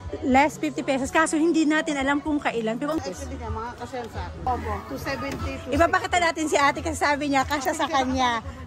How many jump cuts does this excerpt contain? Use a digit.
2